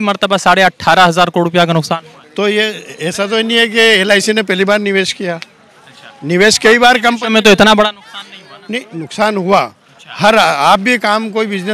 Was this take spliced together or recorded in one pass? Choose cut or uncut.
uncut